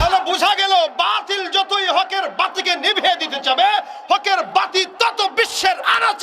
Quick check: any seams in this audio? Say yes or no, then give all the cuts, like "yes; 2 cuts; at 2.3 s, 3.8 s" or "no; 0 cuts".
no; 0 cuts